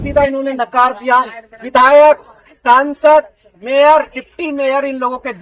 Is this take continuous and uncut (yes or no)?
yes